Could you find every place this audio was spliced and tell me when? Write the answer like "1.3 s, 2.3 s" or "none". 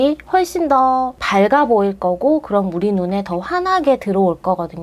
1.2 s